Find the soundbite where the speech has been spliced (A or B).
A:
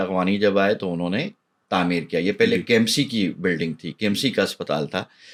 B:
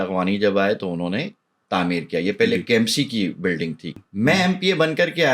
B